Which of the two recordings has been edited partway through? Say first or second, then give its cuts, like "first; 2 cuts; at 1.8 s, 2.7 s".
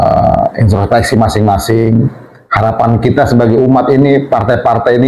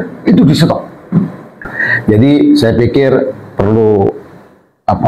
second; 1 cut; at 1.8 s